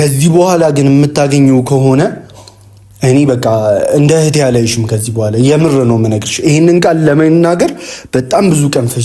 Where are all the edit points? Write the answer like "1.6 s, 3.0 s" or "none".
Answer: none